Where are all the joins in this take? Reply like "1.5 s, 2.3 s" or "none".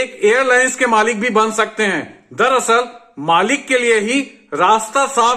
none

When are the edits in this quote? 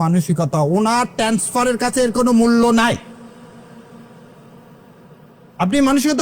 none

